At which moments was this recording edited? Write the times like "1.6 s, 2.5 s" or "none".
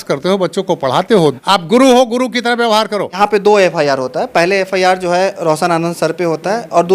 1.4 s, 3.2 s